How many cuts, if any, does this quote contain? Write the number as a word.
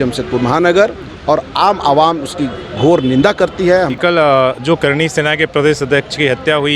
one